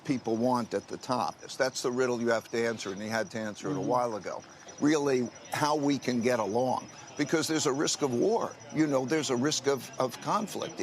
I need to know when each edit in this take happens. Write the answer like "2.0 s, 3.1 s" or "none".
1.4 s, 4.6 s